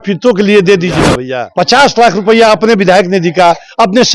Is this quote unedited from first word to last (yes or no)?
no